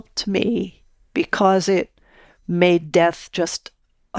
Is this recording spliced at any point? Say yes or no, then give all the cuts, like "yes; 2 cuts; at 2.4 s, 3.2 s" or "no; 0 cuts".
no; 0 cuts